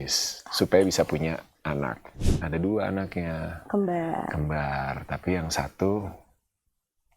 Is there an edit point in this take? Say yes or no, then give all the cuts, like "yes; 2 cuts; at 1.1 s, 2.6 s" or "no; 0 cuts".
yes; 1 cut; at 2.2 s